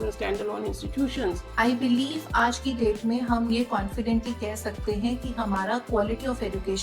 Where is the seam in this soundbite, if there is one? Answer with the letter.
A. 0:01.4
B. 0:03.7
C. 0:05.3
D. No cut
A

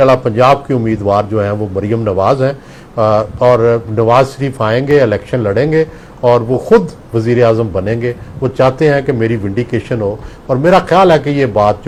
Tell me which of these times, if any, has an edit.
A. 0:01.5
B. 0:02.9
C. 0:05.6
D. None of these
D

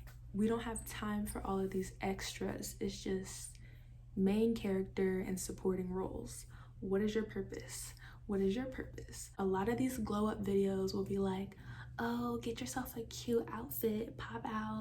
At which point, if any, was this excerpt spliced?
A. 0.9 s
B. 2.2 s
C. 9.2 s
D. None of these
C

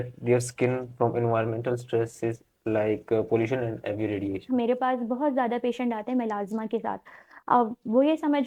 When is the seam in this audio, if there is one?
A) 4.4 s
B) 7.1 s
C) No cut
A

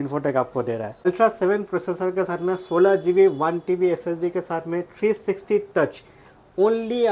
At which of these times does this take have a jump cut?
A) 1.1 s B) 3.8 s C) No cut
A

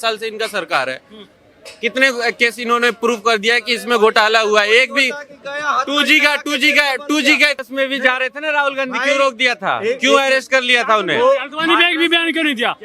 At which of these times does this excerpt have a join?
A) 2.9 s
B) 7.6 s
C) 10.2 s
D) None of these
B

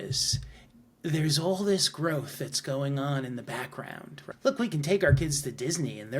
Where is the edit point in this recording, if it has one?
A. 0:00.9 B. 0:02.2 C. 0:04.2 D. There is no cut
C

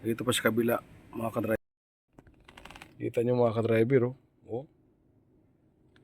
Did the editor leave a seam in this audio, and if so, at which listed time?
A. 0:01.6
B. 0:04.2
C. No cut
A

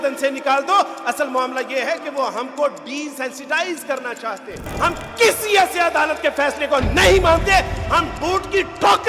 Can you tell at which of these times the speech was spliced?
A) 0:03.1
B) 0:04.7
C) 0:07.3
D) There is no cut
B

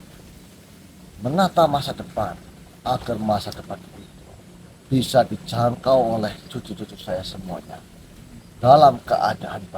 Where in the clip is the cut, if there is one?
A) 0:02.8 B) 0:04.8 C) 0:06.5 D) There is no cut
D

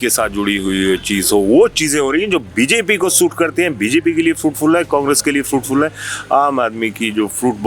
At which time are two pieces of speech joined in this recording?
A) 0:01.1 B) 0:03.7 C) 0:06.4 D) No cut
D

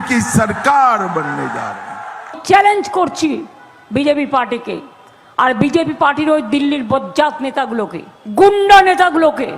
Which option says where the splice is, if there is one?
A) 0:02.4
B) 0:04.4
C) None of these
A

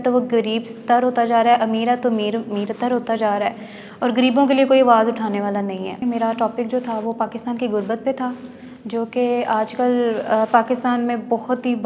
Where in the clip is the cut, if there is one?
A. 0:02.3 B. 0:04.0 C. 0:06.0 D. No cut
C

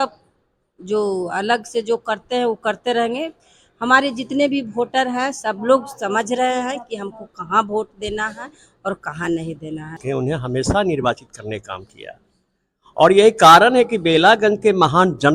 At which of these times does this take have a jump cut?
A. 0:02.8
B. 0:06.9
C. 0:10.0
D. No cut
C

